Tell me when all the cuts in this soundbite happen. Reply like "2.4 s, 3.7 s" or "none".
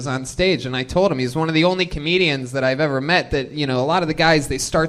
none